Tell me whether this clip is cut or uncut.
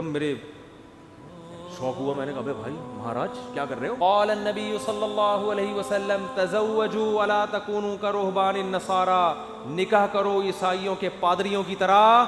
cut